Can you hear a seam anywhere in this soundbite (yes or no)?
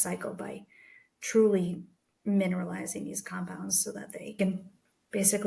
no